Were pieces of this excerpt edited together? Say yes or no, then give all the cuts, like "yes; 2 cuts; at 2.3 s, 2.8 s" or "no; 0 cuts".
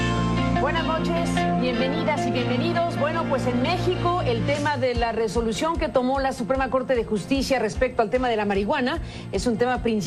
no; 0 cuts